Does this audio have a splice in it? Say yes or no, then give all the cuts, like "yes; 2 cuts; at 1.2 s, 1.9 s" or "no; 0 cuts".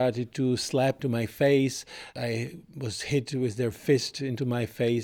yes; 2 cuts; at 1.0 s, 2.1 s